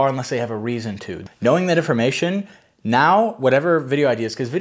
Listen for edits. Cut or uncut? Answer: cut